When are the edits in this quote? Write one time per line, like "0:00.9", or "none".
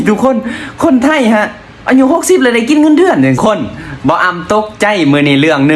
0:03.4